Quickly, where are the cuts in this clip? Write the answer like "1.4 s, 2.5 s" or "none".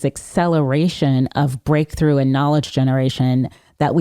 none

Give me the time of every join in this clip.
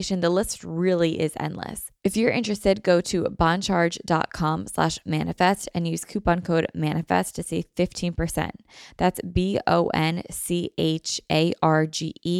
1.8 s

